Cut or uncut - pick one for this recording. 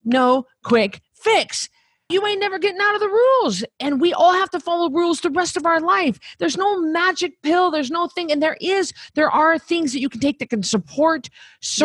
cut